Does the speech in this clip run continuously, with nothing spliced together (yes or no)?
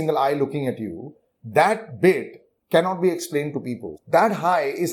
yes